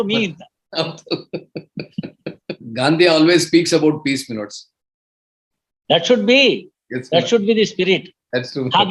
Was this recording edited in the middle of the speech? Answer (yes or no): yes